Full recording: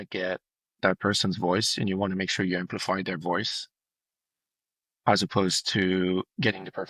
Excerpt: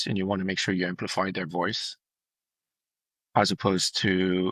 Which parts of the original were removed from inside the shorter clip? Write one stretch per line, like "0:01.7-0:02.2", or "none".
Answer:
none